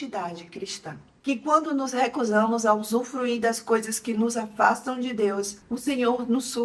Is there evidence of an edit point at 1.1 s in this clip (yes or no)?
yes